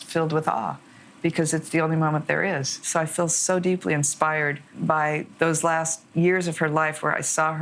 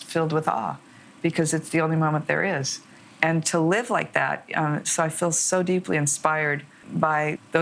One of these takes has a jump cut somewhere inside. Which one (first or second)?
first